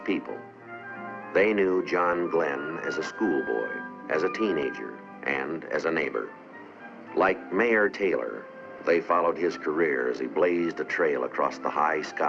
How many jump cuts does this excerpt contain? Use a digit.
1